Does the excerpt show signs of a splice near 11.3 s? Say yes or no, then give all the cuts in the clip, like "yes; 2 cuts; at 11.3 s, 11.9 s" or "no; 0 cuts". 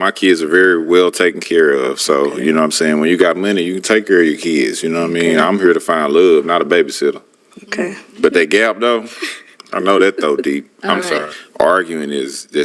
yes; 1 cut; at 11.3 s